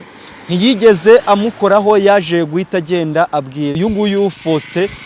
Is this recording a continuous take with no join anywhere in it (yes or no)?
no